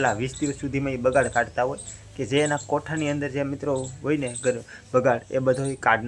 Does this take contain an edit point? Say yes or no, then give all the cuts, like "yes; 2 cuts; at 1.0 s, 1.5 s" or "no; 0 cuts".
no; 0 cuts